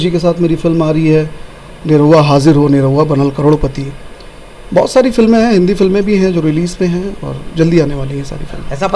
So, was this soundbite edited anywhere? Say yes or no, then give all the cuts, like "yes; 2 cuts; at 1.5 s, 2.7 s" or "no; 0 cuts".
no; 0 cuts